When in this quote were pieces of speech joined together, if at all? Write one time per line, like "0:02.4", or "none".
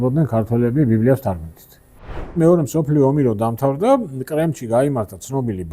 0:02.3

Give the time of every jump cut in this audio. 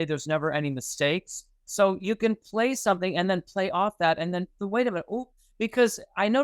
none

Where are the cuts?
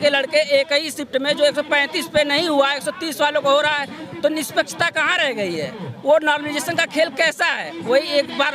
none

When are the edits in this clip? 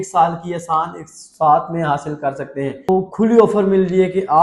0:02.9

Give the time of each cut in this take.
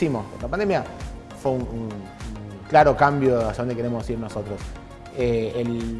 none

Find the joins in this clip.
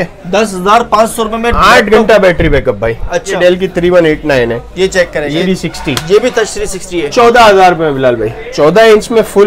0:03.4
0:05.4
0:08.4

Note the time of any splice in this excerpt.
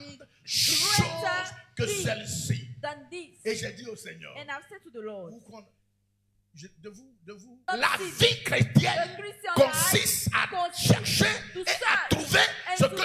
0:07.6

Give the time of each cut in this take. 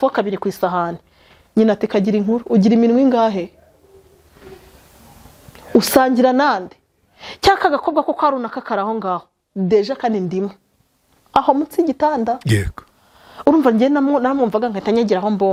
none

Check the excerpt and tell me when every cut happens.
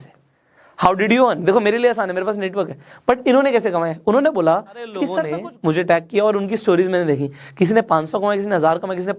0:05.2

